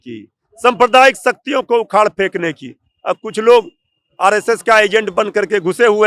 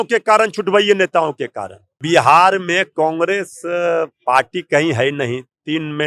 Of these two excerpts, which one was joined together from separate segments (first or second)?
second